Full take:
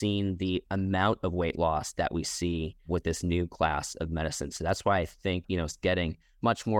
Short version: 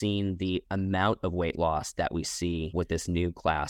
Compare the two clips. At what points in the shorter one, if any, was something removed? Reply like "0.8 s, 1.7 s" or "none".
2.7 s

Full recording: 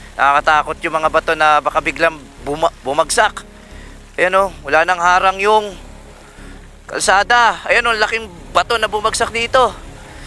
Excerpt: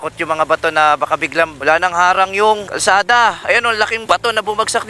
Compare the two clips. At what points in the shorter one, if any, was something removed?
1.6 s, 2.7 s, 4.0 s

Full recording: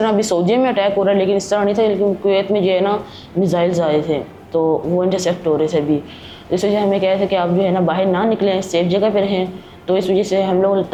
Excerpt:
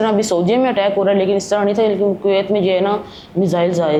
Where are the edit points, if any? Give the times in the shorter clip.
none

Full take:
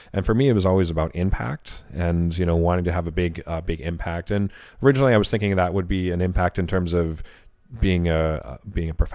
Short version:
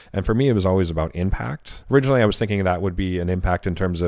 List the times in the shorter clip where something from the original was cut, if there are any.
1.7 s

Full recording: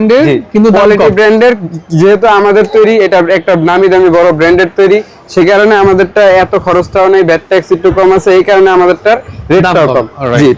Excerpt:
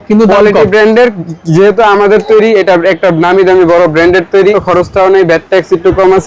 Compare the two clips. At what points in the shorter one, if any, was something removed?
4.6 s

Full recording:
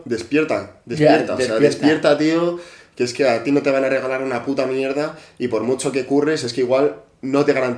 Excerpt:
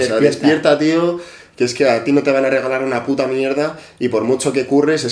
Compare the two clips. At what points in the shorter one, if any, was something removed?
none

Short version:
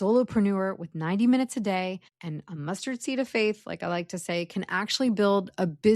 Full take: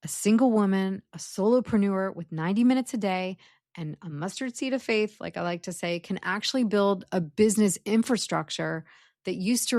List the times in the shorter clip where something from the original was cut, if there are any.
2.1 s

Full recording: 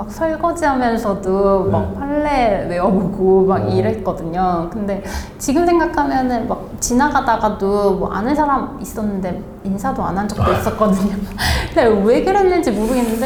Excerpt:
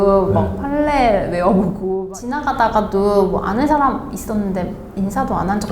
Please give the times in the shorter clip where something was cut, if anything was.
1.9 s

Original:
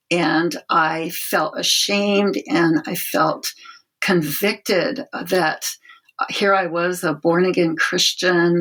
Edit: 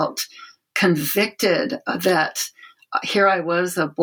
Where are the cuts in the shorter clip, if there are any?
none

